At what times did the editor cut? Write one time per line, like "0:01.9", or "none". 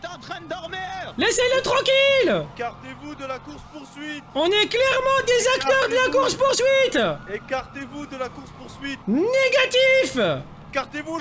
0:01.1
0:02.5
0:04.3
0:09.0